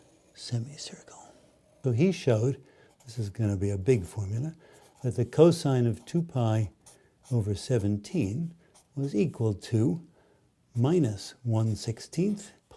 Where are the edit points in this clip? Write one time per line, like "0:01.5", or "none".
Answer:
0:01.6